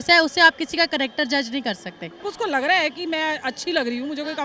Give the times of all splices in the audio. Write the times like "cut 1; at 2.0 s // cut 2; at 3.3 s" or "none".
cut 1; at 2.2 s